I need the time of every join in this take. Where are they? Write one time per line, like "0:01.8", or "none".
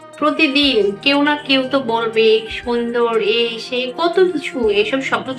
none

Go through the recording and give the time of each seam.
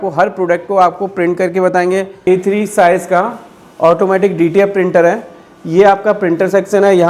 0:02.2

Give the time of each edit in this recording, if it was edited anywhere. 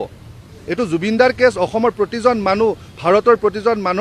none

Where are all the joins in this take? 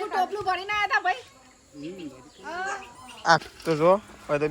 0:03.4

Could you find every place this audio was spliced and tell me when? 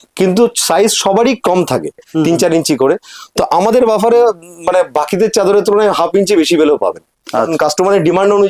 0:02.1
0:07.5

